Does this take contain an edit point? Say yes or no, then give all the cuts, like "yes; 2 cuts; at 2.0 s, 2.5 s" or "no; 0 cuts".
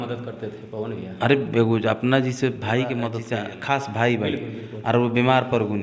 yes; 1 cut; at 3.2 s